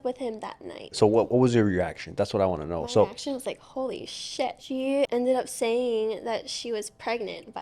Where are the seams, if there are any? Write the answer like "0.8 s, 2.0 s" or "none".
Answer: 0.9 s, 4.6 s